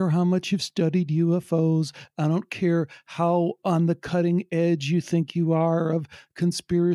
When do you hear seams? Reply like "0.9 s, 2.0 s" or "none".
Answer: none